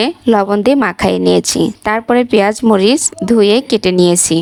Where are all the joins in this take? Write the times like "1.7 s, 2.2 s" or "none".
none